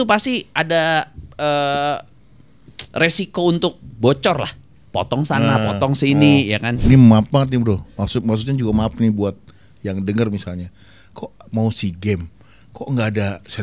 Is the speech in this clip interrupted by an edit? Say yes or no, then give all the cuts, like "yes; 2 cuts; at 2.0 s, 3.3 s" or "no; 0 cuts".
yes; 1 cut; at 6.8 s